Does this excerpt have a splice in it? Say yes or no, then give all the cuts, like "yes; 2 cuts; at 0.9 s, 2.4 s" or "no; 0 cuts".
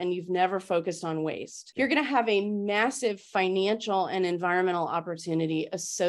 no; 0 cuts